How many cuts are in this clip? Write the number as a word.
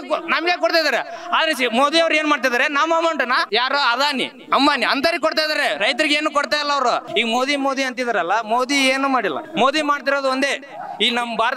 three